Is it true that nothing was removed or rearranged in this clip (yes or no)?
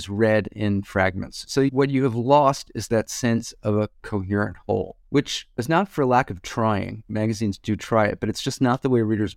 yes